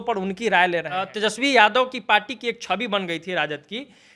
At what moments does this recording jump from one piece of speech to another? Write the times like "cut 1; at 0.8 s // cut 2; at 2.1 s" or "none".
cut 1; at 1.1 s